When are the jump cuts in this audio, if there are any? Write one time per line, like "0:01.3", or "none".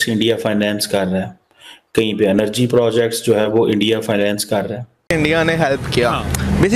0:05.1